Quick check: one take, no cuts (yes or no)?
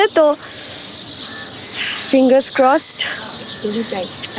yes